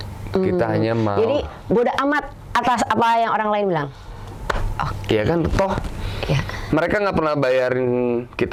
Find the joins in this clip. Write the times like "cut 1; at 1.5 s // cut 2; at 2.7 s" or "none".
none